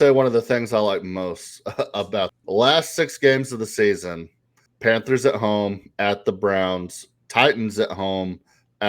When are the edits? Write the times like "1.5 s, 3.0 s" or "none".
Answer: 2.3 s